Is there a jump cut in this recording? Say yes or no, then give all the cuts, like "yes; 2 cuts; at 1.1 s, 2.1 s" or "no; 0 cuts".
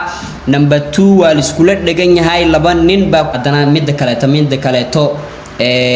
yes; 1 cut; at 3.3 s